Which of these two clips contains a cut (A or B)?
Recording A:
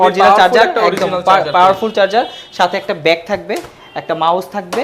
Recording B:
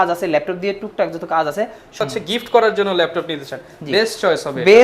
B